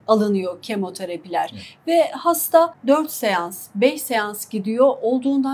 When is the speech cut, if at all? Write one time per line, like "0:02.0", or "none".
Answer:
0:02.8